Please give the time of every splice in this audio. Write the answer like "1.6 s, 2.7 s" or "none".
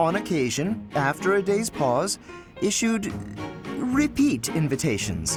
none